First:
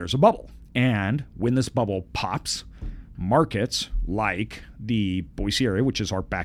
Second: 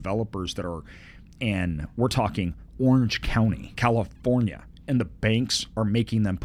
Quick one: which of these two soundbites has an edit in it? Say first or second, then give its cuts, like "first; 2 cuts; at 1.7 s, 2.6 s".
second; 1 cut; at 3.7 s